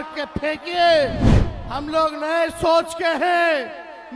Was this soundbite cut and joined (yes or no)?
no